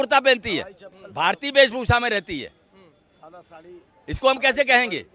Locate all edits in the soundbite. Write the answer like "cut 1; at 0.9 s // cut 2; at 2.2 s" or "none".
none